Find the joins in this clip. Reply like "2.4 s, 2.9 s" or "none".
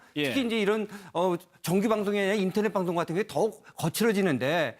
2.2 s